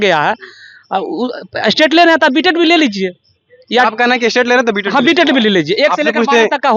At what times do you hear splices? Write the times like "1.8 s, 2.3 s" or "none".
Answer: none